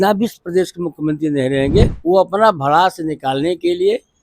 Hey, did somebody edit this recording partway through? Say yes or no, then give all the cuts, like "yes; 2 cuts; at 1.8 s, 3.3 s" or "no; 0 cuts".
yes; 1 cut; at 2.0 s